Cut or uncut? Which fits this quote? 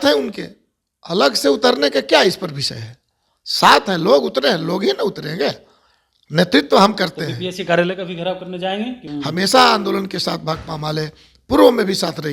cut